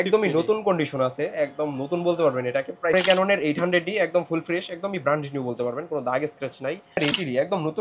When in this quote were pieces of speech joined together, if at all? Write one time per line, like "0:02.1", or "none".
0:02.9
0:07.0